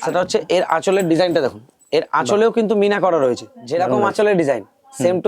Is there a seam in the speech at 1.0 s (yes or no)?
no